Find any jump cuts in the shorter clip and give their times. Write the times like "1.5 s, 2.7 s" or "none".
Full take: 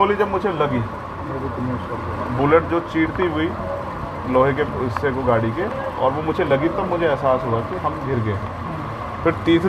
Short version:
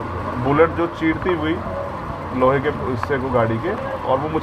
none